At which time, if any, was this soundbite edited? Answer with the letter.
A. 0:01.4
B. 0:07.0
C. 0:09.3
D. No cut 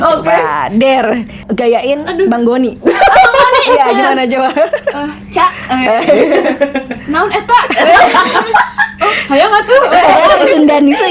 A